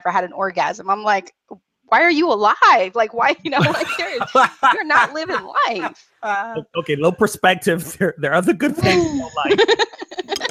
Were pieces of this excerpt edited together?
no; 0 cuts

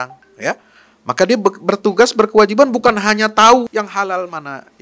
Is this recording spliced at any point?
yes; 1 cut; at 3.7 s

